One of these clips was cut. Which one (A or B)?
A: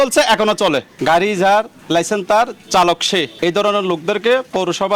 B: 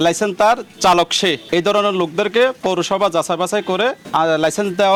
A